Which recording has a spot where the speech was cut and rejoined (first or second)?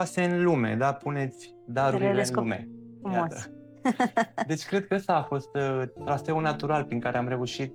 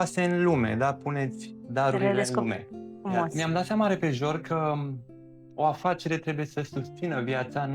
second